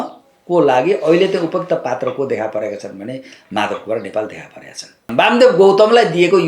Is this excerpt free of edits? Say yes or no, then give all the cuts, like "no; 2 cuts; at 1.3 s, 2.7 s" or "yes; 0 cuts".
no; 1 cut; at 5.1 s